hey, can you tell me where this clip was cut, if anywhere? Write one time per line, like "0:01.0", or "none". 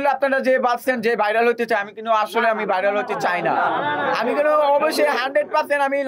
none